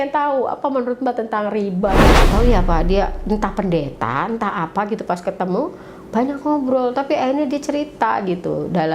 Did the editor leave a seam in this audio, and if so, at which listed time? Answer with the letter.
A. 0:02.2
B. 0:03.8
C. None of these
A